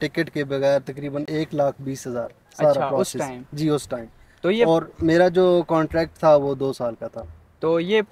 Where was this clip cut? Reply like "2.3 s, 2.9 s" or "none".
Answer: none

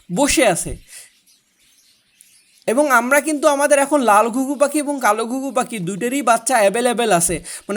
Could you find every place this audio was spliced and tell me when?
none

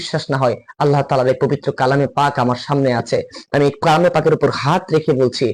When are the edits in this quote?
none

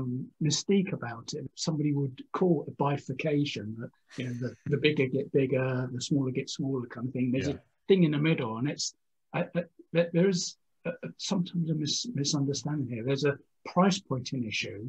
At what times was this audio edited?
none

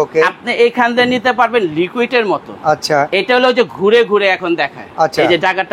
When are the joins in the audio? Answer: 4.8 s

